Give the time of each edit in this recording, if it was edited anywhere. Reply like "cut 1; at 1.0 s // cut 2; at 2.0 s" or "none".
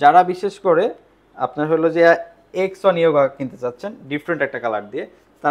none